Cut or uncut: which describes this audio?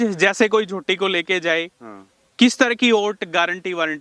uncut